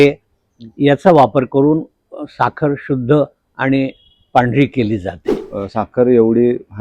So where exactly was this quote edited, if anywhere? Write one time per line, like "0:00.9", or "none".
0:05.5